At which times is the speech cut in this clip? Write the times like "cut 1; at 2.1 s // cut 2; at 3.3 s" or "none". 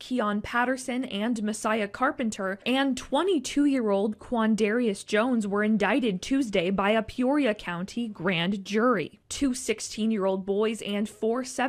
none